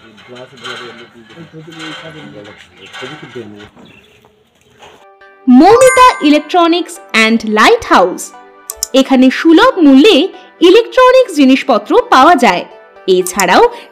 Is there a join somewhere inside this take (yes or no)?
no